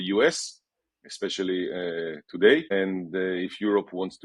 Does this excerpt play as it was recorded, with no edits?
no; 1 cut; at 2.7 s

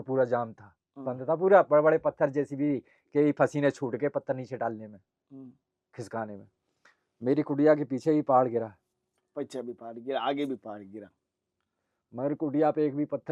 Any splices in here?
no; 0 cuts

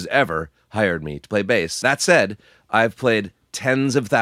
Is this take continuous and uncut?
no; 1 cut; at 1.7 s

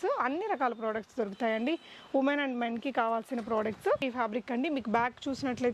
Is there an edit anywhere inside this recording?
yes; 1 cut; at 4.0 s

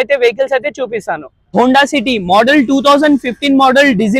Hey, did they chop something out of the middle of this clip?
yes; 1 cut; at 1.4 s

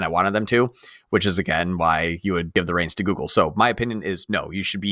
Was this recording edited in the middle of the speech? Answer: yes; 1 cut; at 2.5 s

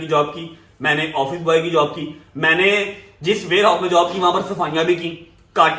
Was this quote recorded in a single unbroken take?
yes; 0 cuts

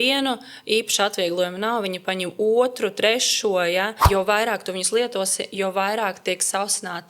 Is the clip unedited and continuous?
no; 1 cut; at 4.0 s

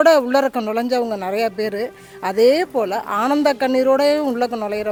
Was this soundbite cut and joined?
no; 0 cuts

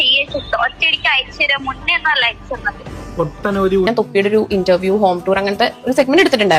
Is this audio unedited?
no; 1 cut; at 3.9 s

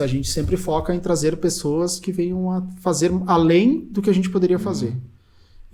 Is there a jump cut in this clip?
no; 0 cuts

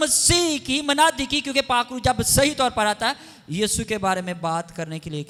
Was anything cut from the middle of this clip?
no; 0 cuts

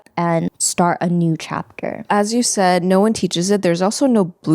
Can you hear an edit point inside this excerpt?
yes; 1 cut; at 2.0 s

